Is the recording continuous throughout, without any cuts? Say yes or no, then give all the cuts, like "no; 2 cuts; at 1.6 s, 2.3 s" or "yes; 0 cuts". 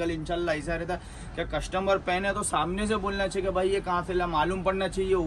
yes; 0 cuts